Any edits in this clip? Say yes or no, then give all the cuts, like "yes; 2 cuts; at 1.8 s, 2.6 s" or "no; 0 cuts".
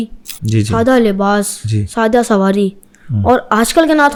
no; 0 cuts